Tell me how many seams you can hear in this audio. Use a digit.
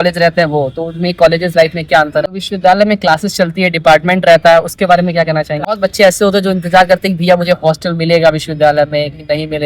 2